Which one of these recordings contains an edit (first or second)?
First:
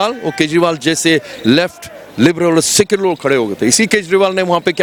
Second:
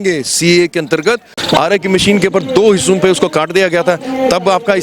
second